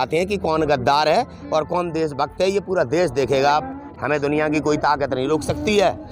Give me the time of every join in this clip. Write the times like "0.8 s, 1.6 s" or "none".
3.8 s